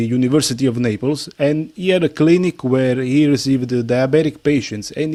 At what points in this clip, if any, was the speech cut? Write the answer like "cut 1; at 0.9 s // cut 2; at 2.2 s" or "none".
none

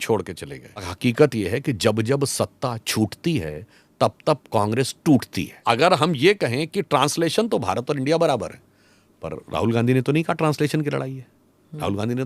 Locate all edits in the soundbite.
cut 1; at 0.9 s // cut 2; at 5.6 s

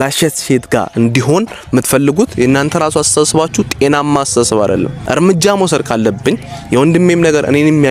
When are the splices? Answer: cut 1; at 5.0 s

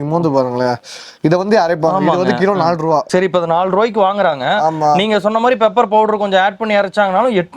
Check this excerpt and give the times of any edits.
cut 1; at 3.1 s

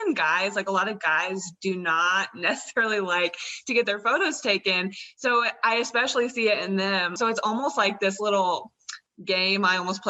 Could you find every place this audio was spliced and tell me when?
cut 1; at 7.1 s

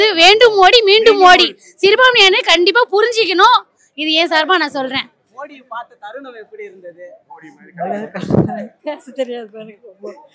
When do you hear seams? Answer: none

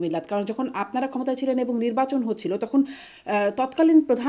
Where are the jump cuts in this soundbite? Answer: none

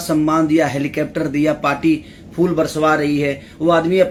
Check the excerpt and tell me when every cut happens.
none

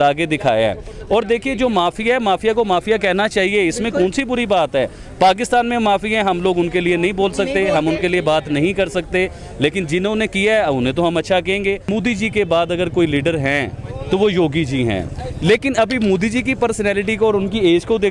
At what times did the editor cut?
cut 1; at 11.9 s

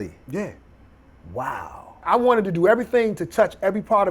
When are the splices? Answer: cut 1; at 2.0 s

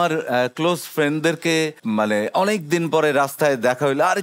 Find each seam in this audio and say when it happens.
cut 1; at 1.8 s

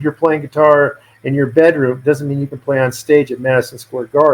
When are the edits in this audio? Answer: none

